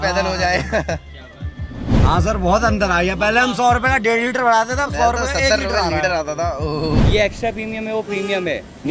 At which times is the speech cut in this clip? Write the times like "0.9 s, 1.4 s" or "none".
1.9 s, 7.0 s